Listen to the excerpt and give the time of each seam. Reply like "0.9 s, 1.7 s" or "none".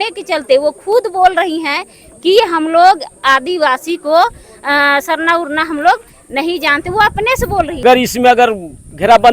7.8 s